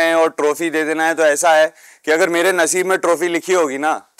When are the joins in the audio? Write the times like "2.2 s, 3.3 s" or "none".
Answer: none

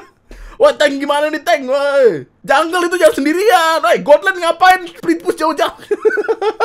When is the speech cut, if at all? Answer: 2.3 s, 4.9 s

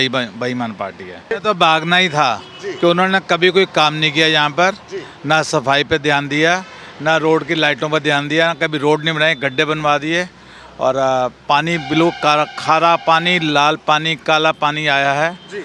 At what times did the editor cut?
1.3 s

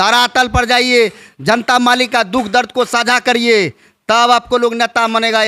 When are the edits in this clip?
none

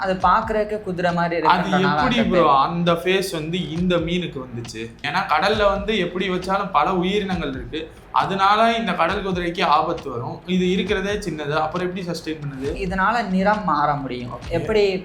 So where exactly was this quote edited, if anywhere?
5.0 s, 12.8 s

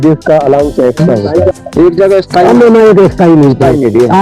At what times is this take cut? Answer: 1.5 s

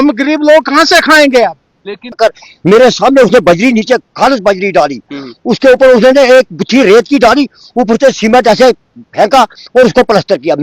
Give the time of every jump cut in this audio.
2.2 s

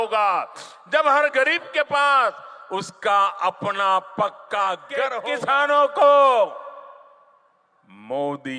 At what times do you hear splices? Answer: 5.2 s

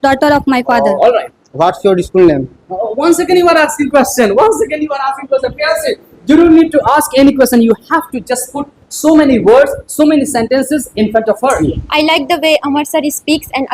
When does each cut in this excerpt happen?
11.6 s

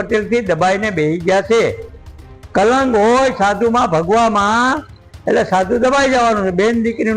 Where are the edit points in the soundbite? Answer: none

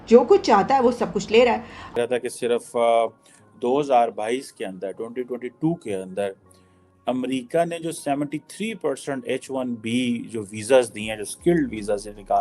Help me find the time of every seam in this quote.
2.0 s

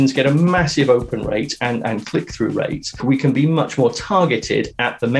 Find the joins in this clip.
3.0 s

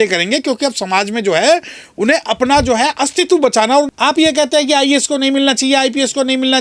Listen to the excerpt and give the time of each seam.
3.9 s

